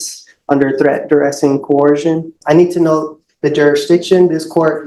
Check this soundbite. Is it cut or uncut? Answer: cut